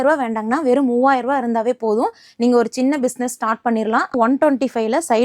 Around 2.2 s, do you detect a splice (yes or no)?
no